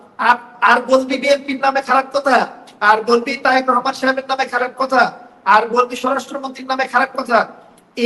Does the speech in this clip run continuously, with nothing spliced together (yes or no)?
yes